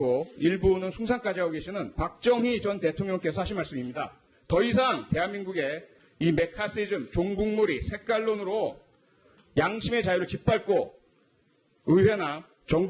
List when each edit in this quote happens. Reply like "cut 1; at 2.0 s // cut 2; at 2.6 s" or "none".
cut 1; at 1.9 s